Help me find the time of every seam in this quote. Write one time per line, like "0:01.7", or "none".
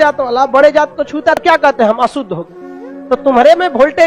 0:01.4